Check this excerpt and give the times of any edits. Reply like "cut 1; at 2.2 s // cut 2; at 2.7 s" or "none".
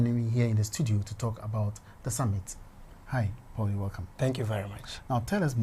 cut 1; at 3.7 s